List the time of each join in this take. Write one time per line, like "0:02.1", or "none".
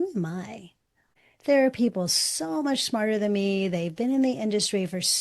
0:01.1